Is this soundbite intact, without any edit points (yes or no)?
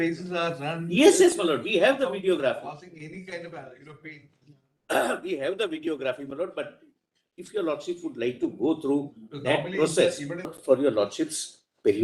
no